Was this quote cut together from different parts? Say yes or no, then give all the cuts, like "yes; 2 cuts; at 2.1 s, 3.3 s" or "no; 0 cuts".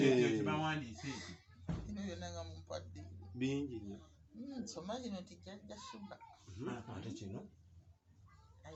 no; 0 cuts